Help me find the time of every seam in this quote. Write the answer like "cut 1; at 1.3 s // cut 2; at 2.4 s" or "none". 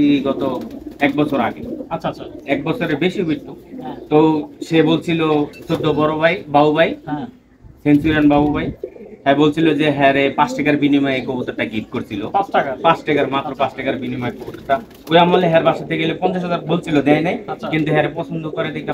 none